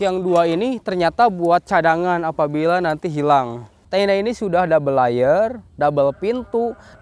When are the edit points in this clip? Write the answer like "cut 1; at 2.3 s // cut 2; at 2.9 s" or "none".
cut 1; at 3.8 s